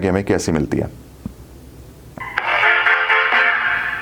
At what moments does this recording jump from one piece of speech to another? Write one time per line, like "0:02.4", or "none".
0:02.2